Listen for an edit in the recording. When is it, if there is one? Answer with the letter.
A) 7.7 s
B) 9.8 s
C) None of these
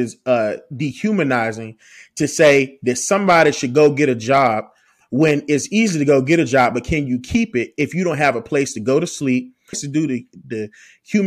B